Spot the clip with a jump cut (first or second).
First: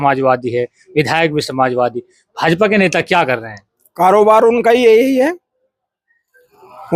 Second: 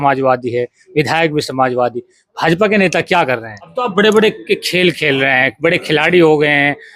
second